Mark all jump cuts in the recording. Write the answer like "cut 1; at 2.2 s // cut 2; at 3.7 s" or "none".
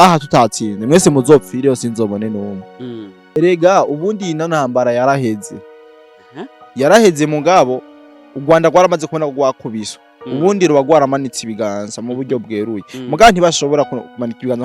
cut 1; at 3.4 s